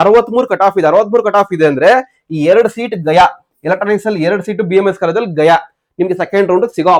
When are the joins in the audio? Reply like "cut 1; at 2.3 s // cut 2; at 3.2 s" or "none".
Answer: none